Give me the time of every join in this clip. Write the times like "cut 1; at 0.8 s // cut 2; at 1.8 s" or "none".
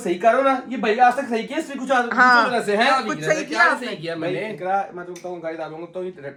none